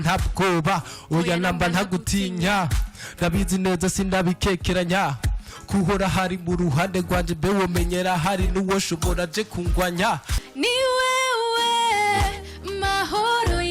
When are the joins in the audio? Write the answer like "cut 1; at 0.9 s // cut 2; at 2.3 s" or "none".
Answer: cut 1; at 10.4 s